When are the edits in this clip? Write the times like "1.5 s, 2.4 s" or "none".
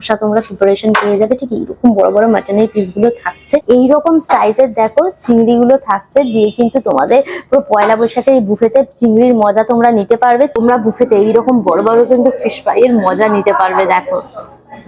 3.6 s, 10.6 s